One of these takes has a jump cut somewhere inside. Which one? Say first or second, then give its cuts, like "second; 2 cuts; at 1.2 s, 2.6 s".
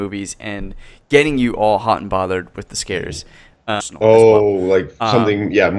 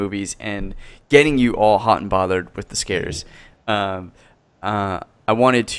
second; 1 cut; at 3.8 s